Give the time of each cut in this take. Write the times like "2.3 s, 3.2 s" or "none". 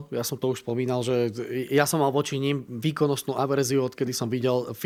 none